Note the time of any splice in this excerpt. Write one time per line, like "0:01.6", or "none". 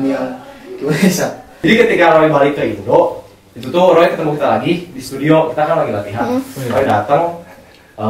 0:01.6